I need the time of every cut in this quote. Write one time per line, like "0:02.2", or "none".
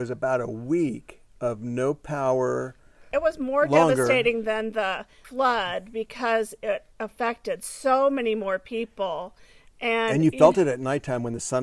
0:03.1